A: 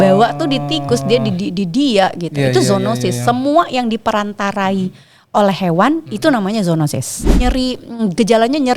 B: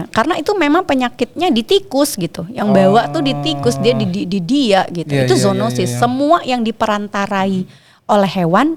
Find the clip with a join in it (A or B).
A